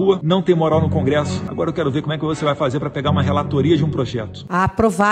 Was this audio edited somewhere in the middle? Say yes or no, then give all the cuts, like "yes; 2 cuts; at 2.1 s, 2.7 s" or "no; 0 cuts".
no; 0 cuts